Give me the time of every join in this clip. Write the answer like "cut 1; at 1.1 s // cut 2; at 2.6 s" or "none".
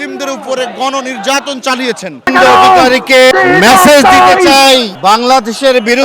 cut 1; at 2.3 s // cut 2; at 3.3 s // cut 3; at 4.9 s